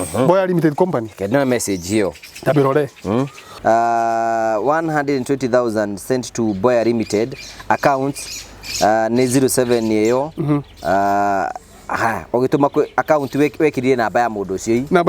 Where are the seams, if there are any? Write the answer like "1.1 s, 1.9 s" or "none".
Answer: 3.4 s